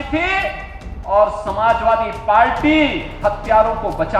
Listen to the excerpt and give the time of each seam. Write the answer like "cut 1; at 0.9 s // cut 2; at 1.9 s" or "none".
cut 1; at 3.1 s

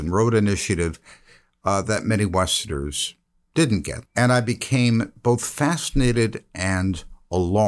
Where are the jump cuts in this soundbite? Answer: cut 1; at 3.9 s

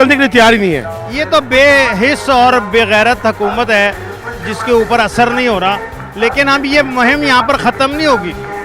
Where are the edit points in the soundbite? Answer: cut 1; at 1.0 s

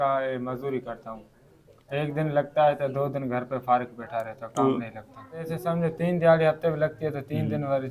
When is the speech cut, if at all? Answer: cut 1; at 5.5 s

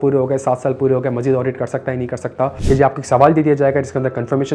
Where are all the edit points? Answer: cut 1; at 2.6 s

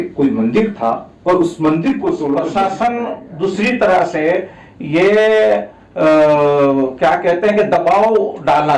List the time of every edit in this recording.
cut 1; at 2.4 s

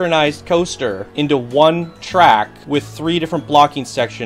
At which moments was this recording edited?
cut 1; at 1.0 s // cut 2; at 2.6 s

